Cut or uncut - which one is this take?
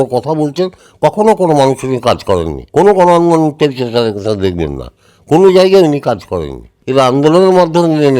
cut